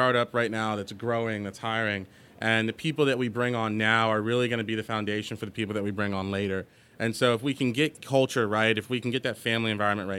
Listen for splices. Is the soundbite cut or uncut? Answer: uncut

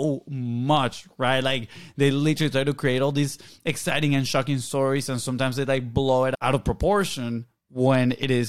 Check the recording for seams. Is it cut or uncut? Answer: cut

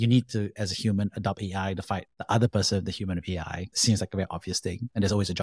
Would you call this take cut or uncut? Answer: cut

